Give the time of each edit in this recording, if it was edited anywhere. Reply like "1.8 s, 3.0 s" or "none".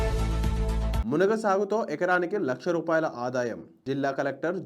1.0 s

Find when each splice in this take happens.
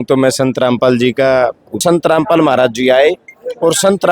1.8 s

